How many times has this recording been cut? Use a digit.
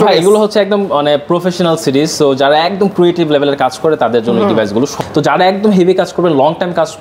1